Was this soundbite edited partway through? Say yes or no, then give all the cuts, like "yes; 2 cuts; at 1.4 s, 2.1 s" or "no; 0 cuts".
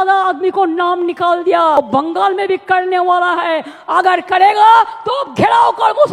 yes; 1 cut; at 1.8 s